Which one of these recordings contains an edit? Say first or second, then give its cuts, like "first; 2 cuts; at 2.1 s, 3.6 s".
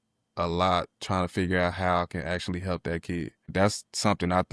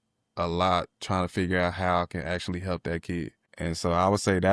first; 1 cut; at 3.5 s